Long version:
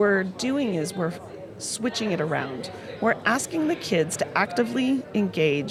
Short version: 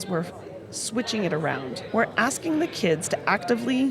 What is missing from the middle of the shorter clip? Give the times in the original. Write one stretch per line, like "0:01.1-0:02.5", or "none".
0:02.7-0:02.9